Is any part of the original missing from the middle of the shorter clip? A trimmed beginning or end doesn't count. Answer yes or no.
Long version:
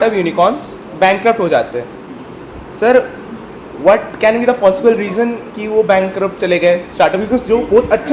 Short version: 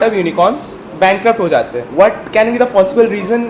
yes